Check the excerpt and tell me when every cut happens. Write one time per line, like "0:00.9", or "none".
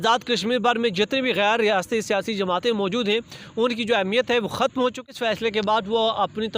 0:05.2